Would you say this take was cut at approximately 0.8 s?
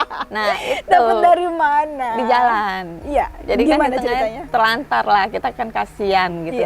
no; 0 cuts

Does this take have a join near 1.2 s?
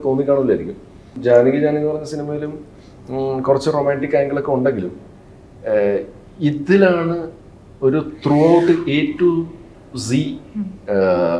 yes; 1 cut; at 1.2 s

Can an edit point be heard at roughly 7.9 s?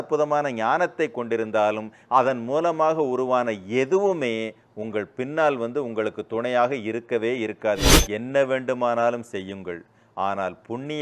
yes; 1 cut; at 7.9 s

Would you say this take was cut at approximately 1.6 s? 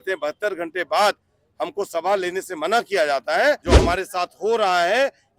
no; 1 cut; at 3.6 s

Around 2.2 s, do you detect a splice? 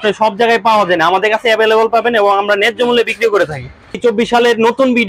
no; 1 cut; at 4.0 s

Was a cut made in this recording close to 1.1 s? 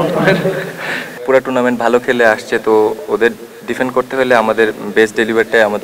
yes; 1 cut; at 1.1 s

